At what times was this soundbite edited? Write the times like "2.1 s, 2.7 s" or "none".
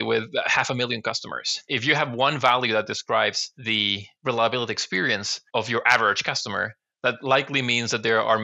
1.7 s